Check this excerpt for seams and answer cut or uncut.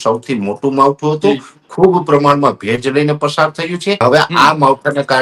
cut